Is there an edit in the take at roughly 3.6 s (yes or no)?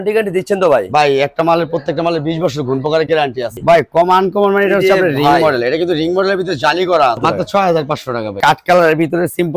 yes